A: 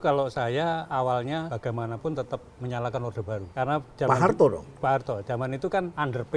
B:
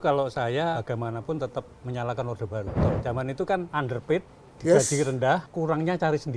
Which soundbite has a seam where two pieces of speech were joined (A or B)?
B